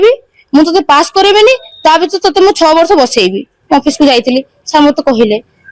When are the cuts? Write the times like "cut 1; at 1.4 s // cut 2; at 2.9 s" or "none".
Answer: cut 1; at 3.5 s